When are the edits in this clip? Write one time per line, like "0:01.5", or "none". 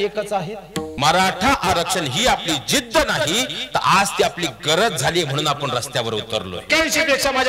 0:00.9
0:06.6